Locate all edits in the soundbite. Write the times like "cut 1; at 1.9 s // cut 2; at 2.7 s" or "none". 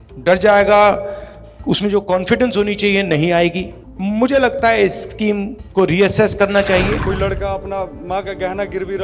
cut 1; at 7.0 s